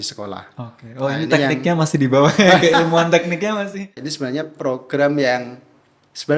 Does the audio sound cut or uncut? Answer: cut